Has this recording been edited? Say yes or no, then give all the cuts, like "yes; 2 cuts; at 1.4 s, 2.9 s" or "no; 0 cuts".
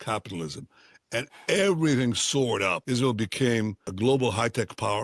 yes; 2 cuts; at 2.8 s, 3.9 s